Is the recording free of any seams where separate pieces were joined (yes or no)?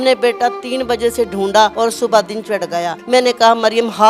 no